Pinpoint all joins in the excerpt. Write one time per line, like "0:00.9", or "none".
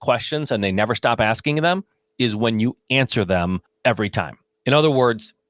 0:03.7